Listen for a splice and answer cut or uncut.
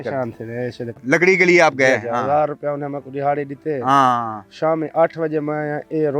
cut